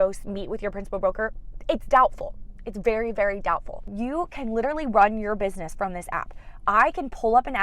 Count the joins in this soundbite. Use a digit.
1